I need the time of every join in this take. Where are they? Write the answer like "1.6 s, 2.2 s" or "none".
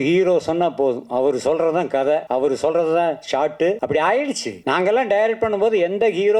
2.3 s, 3.8 s, 4.5 s